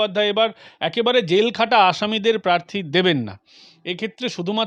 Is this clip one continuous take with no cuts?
yes; 0 cuts

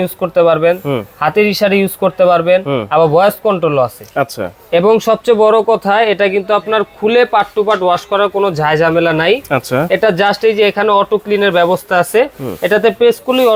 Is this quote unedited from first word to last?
yes; 0 cuts

